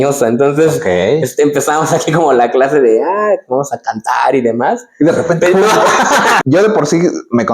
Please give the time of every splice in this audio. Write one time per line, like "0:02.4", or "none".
0:06.4